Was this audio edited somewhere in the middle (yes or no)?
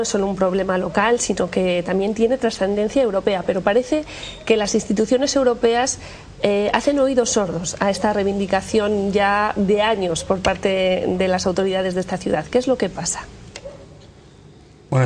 yes